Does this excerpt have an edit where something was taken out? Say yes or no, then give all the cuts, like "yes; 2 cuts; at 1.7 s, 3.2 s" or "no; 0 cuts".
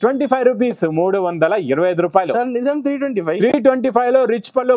no; 0 cuts